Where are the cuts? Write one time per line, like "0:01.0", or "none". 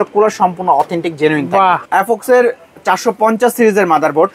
0:01.8